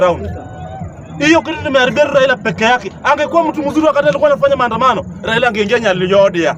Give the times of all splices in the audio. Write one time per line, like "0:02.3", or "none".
none